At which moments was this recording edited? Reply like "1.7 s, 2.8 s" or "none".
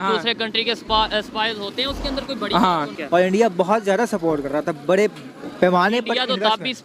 3.0 s